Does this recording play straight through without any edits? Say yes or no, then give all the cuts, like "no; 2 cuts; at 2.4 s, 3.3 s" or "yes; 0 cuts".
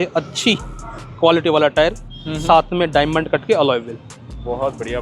yes; 0 cuts